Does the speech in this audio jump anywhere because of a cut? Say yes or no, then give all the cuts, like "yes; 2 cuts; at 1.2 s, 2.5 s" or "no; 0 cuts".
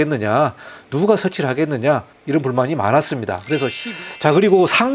yes; 1 cut; at 3.8 s